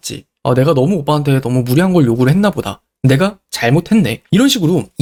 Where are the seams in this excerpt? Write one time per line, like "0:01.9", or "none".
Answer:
none